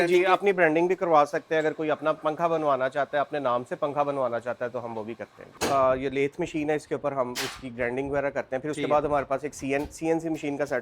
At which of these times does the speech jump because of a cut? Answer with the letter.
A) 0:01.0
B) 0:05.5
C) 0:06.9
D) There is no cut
B